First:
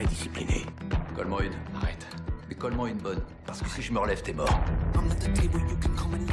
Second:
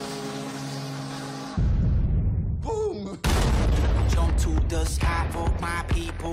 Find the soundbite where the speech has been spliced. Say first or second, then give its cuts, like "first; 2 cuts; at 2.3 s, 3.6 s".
first; 1 cut; at 4.5 s